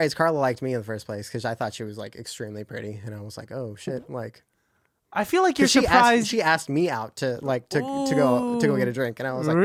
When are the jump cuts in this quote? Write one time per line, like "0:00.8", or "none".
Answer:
none